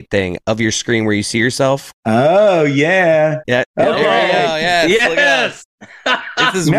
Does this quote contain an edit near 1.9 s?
yes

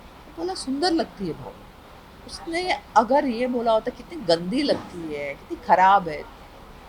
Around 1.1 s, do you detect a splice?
no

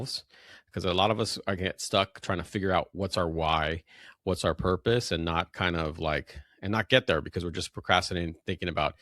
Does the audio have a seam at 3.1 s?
no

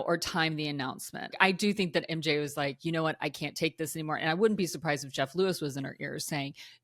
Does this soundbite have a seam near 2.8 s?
yes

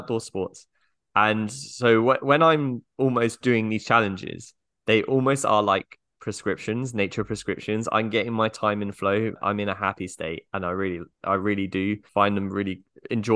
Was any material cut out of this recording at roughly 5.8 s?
no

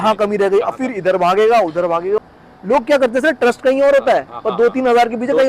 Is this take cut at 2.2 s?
yes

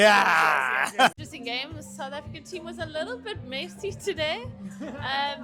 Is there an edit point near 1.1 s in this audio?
yes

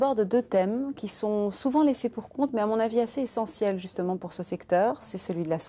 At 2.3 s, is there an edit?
no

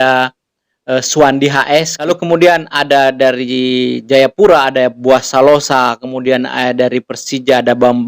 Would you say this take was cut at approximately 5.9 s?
no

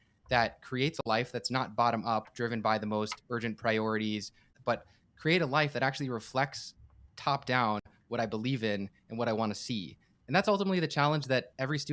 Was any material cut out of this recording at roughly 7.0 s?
no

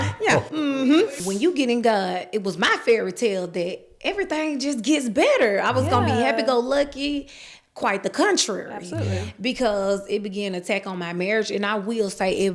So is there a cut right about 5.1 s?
no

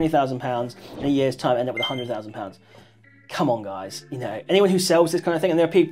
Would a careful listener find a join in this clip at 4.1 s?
no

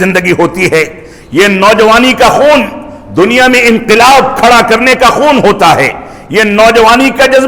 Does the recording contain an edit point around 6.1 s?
no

